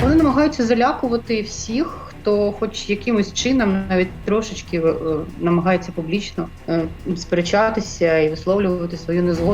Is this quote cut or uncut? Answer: cut